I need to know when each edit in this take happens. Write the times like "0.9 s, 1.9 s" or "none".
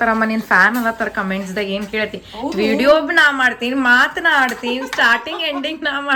none